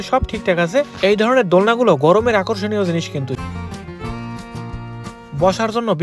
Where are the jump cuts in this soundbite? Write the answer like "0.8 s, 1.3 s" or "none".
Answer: 3.4 s